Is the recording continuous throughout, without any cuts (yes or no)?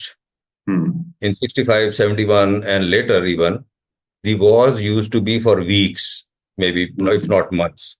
yes